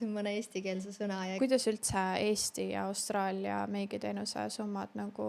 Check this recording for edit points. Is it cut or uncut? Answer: cut